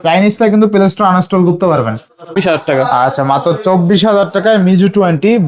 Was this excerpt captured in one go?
no; 1 cut; at 2.3 s

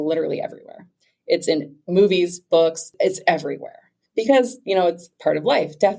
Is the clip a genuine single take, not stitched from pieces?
no; 1 cut; at 2.9 s

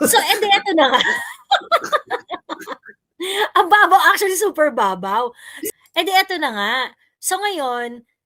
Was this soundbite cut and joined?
yes; 1 cut; at 5.5 s

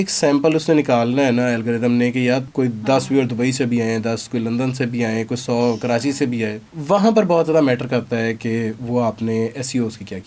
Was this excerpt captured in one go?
no; 2 cuts; at 2.5 s, 6.7 s

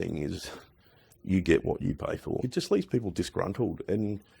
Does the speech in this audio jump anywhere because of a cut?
yes; 1 cut; at 2.4 s

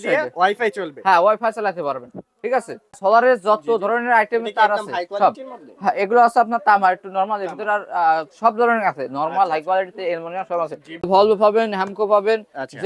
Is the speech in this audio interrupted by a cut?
yes; 2 cuts; at 3.0 s, 11.0 s

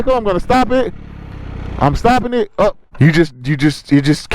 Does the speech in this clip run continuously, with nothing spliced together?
no; 1 cut; at 2.8 s

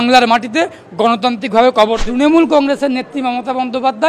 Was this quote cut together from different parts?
yes; 1 cut; at 2.0 s

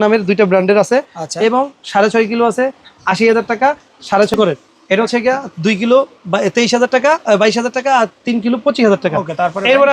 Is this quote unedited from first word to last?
no; 1 cut; at 4.3 s

